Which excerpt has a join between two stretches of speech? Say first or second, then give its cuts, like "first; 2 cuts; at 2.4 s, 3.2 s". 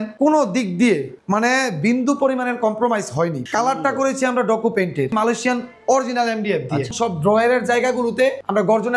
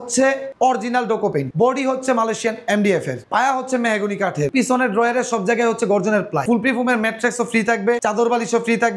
first; 2 cuts; at 5.1 s, 6.9 s